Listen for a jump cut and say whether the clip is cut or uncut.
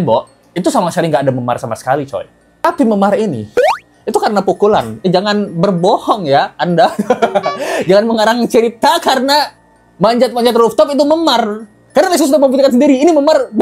uncut